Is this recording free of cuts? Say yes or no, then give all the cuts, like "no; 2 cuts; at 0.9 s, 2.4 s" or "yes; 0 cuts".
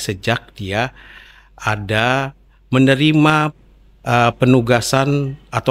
yes; 0 cuts